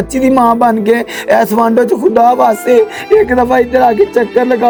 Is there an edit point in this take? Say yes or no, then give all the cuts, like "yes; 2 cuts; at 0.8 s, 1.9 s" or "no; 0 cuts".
no; 0 cuts